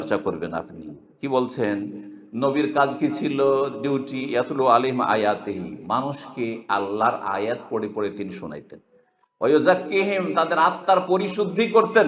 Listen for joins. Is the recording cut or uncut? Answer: uncut